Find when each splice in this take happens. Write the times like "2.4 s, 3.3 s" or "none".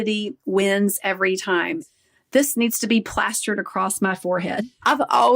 1.8 s